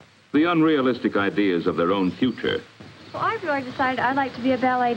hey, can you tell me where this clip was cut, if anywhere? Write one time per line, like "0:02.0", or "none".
none